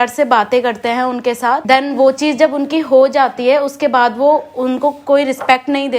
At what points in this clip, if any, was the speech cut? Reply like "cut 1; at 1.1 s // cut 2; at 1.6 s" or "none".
cut 1; at 1.6 s